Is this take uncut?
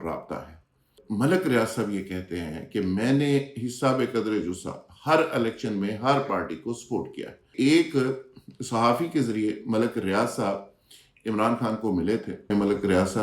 no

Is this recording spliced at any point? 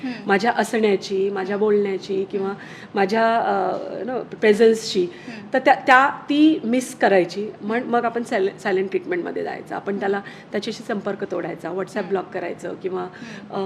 no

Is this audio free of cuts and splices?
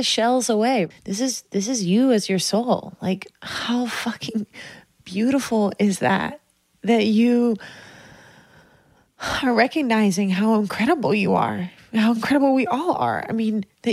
no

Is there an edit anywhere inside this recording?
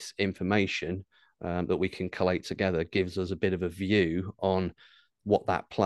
no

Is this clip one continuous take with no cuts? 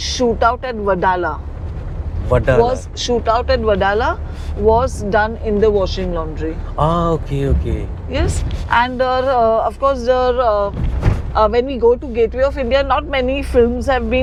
yes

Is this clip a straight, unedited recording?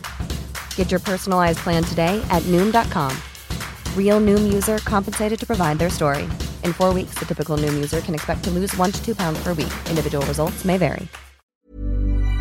no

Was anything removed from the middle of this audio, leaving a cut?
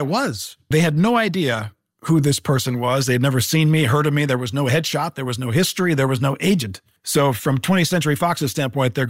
no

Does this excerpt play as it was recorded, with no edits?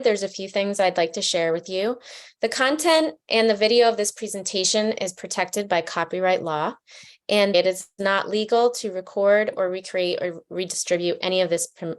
no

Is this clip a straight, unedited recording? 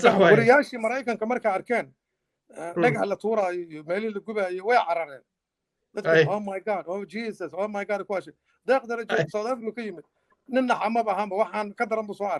yes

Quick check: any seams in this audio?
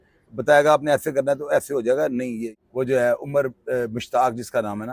yes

